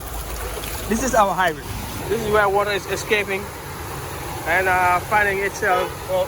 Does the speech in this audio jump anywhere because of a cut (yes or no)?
yes